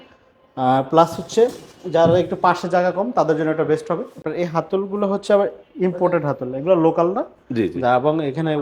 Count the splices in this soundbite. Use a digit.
1